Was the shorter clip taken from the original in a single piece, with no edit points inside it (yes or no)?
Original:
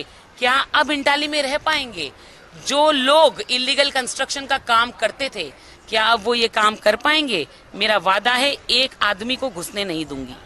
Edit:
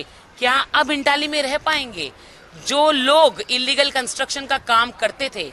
yes